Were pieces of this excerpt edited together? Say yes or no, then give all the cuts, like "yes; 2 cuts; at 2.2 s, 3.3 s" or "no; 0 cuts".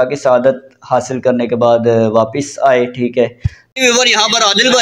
yes; 1 cut; at 3.7 s